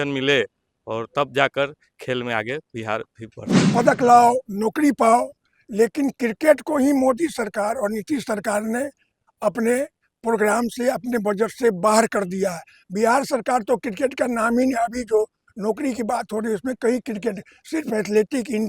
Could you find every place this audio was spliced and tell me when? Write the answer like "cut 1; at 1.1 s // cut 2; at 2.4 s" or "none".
cut 1; at 3.5 s